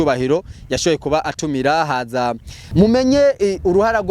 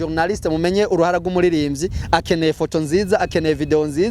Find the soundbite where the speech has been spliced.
first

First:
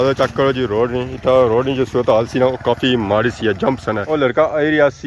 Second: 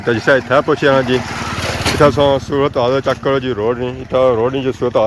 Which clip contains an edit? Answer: first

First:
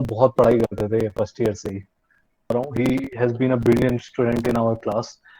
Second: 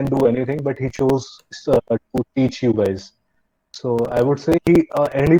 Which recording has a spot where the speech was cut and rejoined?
first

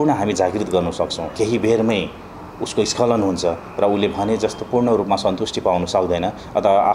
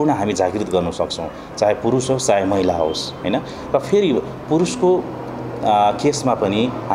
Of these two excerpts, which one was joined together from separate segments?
first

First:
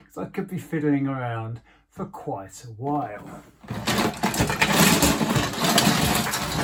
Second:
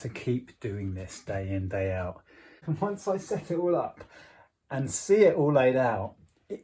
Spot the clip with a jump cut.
second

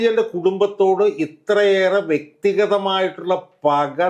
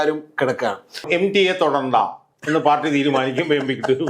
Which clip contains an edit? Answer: second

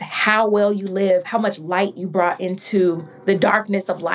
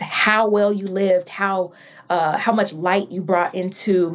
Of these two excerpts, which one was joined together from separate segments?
first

